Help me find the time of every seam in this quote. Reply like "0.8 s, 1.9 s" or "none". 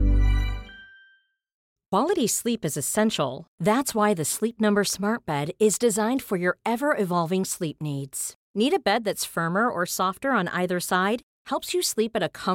1.6 s